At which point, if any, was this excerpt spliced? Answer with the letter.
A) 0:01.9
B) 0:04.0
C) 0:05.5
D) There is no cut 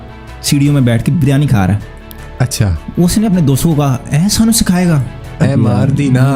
C